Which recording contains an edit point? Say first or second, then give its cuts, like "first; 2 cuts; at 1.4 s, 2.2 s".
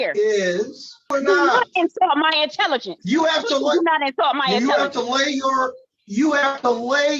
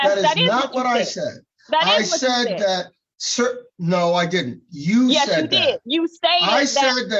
first; 1 cut; at 1.1 s